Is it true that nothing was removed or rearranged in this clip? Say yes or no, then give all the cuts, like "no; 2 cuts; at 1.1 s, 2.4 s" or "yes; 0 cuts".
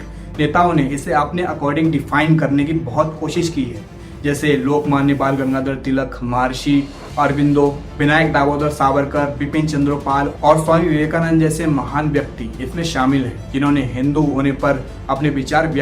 yes; 0 cuts